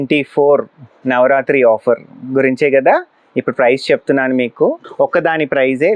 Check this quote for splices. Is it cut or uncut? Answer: cut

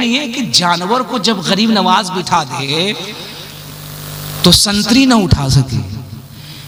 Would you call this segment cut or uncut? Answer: uncut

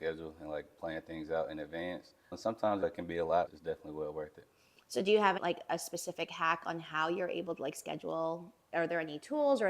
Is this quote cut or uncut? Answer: cut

